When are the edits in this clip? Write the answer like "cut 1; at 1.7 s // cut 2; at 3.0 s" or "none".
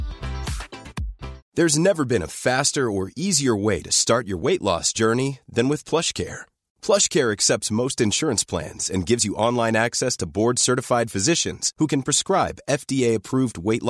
cut 1; at 1.4 s